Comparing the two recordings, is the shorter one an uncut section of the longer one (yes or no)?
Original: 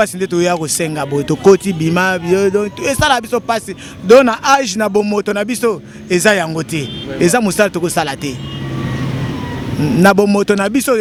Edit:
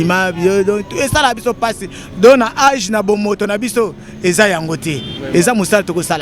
yes